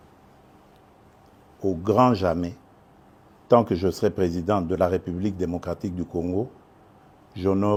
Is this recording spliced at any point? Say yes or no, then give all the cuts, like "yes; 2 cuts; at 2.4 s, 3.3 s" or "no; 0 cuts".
no; 0 cuts